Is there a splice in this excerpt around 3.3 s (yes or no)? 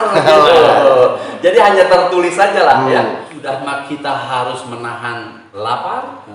yes